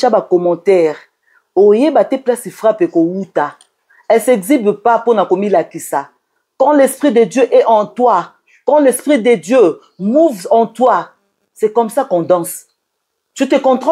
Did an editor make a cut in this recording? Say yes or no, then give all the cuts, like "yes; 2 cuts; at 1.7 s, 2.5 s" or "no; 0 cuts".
no; 0 cuts